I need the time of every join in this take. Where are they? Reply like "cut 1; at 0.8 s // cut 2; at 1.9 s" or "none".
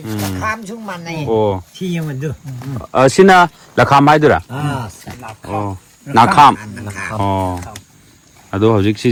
none